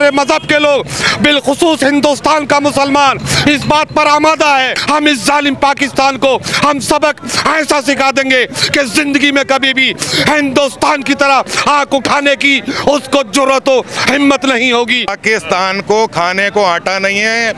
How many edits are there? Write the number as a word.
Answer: two